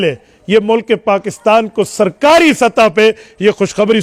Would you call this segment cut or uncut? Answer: uncut